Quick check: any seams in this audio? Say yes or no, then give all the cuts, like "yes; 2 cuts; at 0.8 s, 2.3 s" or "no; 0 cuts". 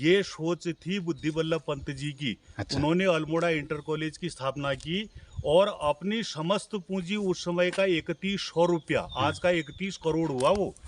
no; 0 cuts